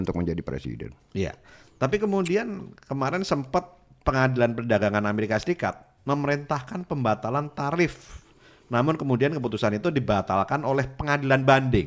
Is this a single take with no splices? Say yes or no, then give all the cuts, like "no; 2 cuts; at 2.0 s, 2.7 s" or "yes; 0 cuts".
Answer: yes; 0 cuts